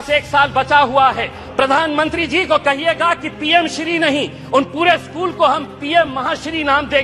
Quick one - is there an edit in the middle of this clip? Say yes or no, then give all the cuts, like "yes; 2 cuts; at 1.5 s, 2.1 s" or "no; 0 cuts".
yes; 1 cut; at 1.4 s